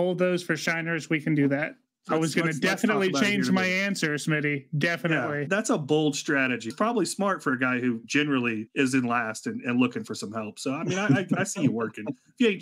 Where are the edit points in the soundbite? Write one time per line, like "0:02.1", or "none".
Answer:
0:01.8
0:05.5
0:06.7
0:08.5